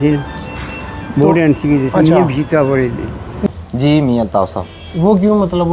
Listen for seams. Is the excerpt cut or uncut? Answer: cut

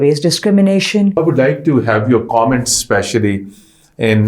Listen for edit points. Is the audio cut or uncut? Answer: cut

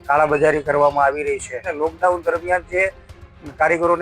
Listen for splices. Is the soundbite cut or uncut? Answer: cut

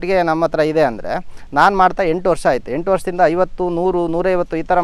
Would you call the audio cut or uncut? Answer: uncut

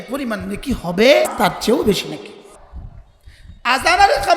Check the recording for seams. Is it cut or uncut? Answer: cut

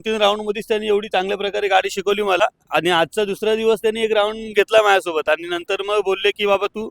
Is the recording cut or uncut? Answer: cut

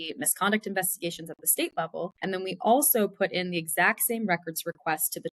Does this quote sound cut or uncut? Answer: cut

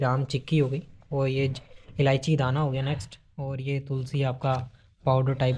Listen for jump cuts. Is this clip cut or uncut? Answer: uncut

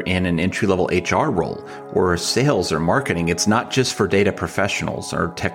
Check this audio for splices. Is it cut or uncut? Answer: uncut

